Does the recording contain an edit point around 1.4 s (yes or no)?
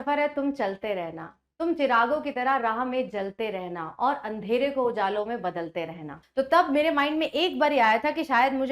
no